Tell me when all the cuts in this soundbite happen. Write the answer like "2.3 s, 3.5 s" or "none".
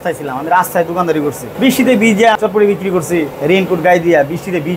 1.5 s, 2.4 s, 3.3 s